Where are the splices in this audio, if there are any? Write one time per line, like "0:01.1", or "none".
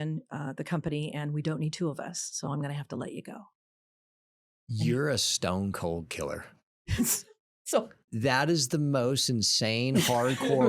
0:08.0